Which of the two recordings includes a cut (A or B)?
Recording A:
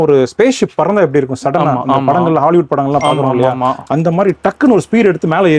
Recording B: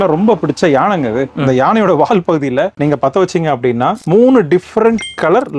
B